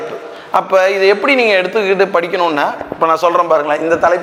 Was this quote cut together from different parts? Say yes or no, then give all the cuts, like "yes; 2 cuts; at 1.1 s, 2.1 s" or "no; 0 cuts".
no; 0 cuts